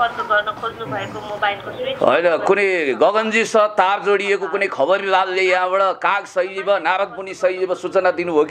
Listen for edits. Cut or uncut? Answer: uncut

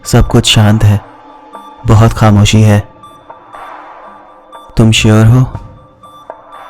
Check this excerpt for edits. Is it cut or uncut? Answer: cut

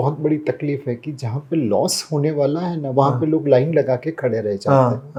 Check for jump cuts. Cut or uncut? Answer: uncut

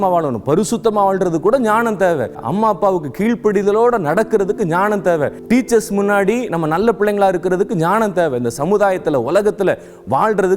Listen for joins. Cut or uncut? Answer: cut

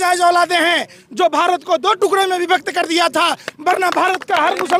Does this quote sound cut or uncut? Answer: uncut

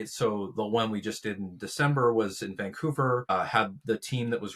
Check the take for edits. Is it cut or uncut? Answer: cut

